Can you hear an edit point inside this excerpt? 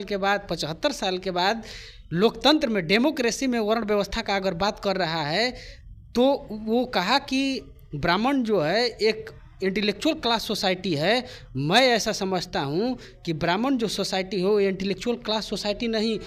no; 0 cuts

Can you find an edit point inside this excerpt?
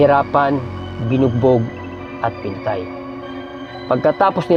no; 0 cuts

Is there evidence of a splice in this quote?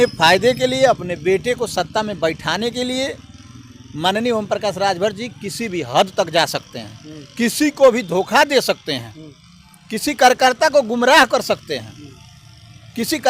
no; 0 cuts

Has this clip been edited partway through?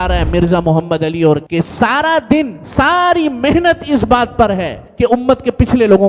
yes; 2 cuts; at 1.4 s, 4.8 s

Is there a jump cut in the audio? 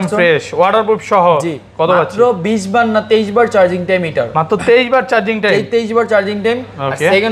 no; 0 cuts

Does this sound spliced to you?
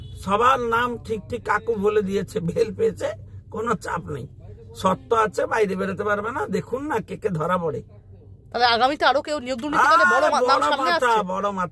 no; 0 cuts

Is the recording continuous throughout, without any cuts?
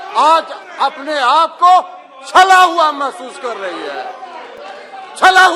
yes; 0 cuts

